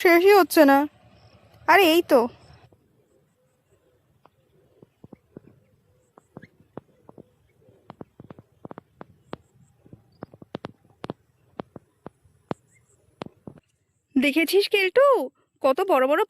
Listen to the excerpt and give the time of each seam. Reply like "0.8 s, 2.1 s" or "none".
13.6 s